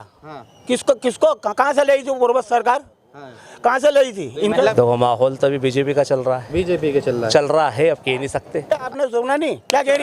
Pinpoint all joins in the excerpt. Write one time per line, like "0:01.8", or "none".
0:04.7
0:08.8